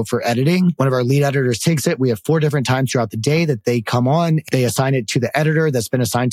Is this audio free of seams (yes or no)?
no